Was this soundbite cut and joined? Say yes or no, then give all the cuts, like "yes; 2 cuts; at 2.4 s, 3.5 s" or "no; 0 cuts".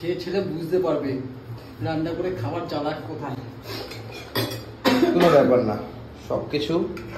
no; 0 cuts